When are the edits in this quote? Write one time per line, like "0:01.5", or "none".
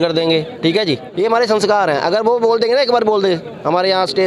0:01.1